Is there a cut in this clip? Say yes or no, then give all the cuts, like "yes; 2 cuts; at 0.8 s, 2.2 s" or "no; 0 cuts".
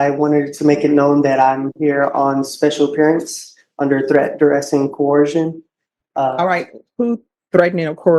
no; 0 cuts